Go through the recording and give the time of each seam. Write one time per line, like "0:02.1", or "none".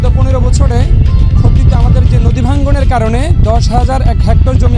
none